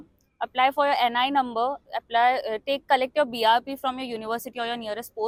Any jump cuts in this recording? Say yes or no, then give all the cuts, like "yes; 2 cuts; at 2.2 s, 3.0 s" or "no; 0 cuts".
no; 0 cuts